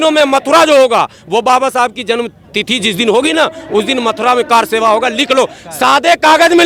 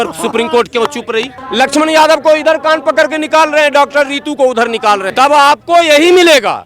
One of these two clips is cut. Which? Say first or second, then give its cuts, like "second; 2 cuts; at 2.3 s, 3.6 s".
second; 2 cuts; at 1.4 s, 5.1 s